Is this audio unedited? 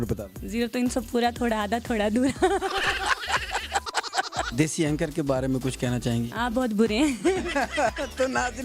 no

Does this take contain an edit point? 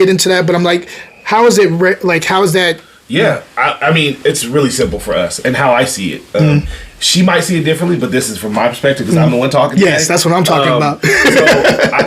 yes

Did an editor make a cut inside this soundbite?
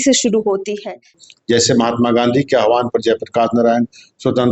yes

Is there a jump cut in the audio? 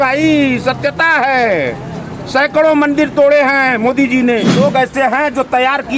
yes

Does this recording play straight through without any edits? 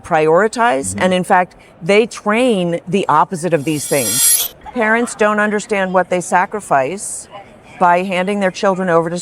no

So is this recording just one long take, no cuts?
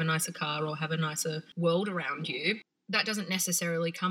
no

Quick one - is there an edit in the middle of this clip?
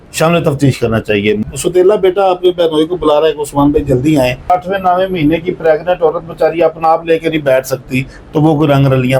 yes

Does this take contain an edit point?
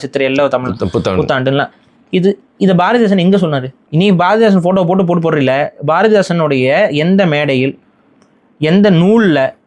yes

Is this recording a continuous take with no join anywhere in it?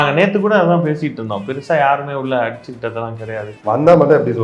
no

